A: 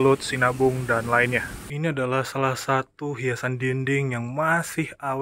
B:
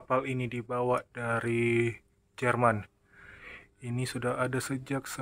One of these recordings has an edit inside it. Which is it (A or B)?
A